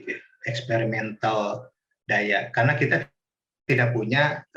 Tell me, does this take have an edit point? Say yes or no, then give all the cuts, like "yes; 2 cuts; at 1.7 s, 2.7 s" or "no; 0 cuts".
no; 0 cuts